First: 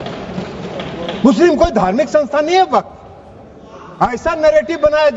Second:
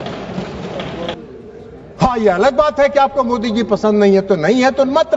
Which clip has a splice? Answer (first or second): second